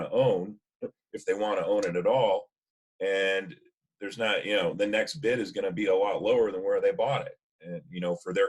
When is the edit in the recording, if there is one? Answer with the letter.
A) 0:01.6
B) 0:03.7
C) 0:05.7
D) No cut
D